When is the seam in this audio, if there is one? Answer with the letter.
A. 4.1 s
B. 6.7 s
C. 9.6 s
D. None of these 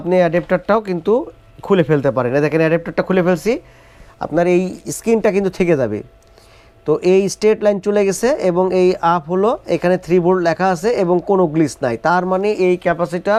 D